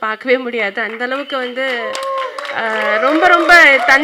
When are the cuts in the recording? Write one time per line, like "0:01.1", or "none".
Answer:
none